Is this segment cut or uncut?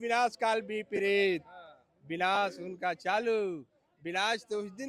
uncut